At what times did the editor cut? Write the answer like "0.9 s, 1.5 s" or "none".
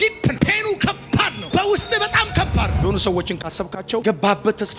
2.8 s